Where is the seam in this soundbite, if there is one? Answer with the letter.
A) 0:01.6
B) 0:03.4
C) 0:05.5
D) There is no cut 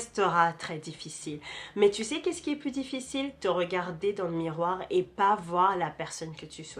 D